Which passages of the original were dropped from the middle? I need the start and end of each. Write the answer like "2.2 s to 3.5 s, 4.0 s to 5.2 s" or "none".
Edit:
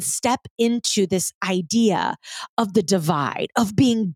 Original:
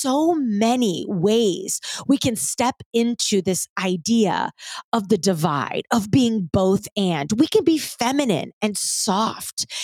none